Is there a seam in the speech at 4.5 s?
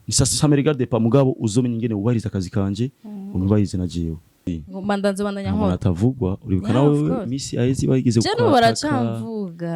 yes; 1 cut; at 4.5 s

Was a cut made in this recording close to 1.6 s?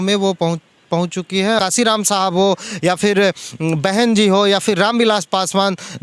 yes; 1 cut; at 1.6 s

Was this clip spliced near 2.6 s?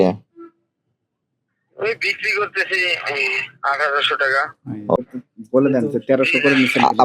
no; 1 cut; at 5.0 s

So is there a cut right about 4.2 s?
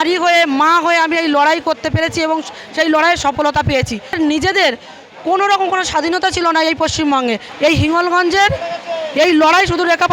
yes; 2 cuts; at 4.2 s, 7.5 s

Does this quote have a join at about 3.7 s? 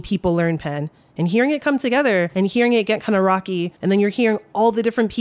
yes; 2 cuts; at 2.3 s, 3.7 s

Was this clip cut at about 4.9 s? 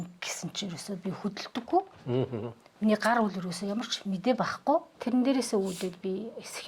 yes; 1 cut; at 4.9 s

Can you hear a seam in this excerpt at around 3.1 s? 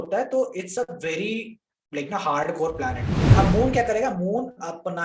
yes; 1 cut; at 3.1 s

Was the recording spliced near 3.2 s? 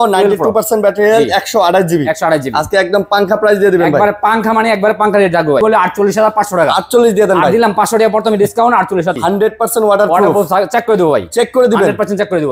no; 2 cuts; at 5.6 s, 9.2 s

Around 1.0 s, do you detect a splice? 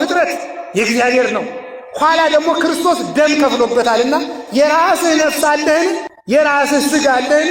no; 1 cut; at 6.1 s

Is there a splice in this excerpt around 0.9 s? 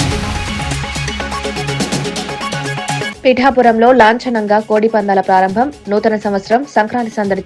no; 1 cut; at 3.1 s

